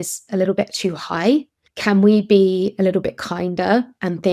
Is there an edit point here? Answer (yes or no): no